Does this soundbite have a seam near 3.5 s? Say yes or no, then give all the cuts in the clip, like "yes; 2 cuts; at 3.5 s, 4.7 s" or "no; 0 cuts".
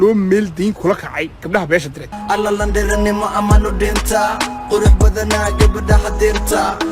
no; 1 cut; at 2.2 s